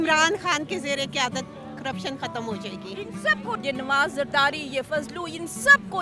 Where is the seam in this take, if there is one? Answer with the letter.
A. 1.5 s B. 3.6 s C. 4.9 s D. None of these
B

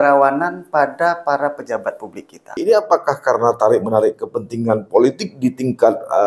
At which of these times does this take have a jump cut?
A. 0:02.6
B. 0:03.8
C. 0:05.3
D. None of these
A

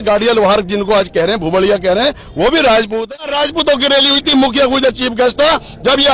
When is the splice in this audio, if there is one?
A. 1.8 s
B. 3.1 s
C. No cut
B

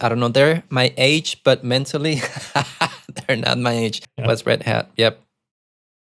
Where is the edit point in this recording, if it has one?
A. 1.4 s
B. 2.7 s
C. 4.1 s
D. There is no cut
C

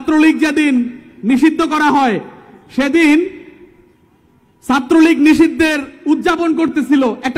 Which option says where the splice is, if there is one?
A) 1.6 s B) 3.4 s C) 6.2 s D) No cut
D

